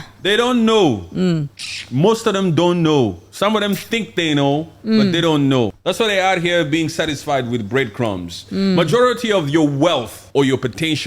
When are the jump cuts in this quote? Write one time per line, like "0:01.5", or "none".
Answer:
0:05.8
0:10.2